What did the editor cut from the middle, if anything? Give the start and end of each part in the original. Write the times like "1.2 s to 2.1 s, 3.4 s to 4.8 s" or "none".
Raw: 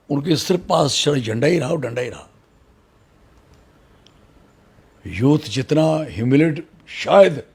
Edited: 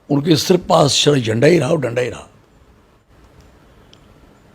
3.0 s to 3.2 s

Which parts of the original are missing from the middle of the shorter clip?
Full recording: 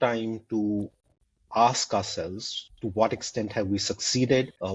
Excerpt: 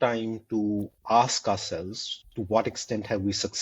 0.9 s to 1.4 s

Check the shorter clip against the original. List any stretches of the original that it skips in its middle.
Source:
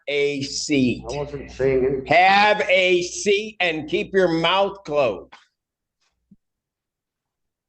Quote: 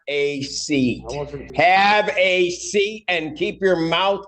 1.5 s to 2.0 s

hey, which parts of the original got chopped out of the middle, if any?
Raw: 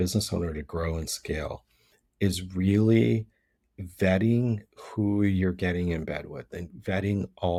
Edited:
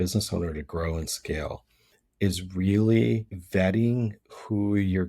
3.3 s to 3.8 s

